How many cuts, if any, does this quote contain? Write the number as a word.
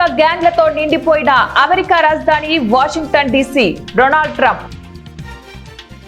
one